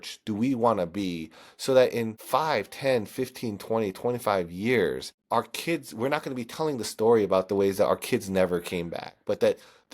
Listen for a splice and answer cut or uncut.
cut